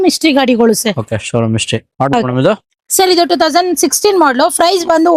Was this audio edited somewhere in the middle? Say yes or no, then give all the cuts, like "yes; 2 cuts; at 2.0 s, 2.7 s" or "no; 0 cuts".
no; 0 cuts